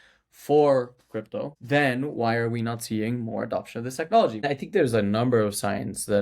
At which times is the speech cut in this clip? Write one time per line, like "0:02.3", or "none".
0:01.5
0:04.4